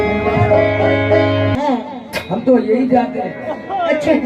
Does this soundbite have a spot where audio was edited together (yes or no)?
yes